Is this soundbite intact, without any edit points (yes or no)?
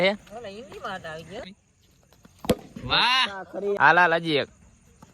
no